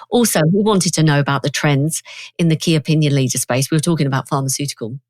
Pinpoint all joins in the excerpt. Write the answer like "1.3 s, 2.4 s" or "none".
none